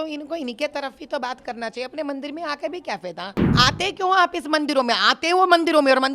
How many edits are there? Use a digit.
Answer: 1